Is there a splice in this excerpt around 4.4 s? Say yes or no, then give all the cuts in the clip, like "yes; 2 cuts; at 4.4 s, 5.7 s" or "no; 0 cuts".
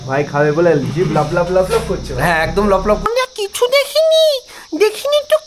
no; 1 cut; at 3.1 s